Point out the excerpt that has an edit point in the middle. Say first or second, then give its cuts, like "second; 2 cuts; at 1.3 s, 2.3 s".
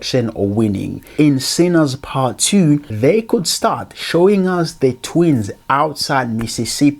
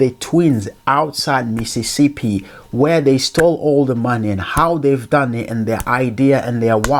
first; 2 cuts; at 1.0 s, 2.9 s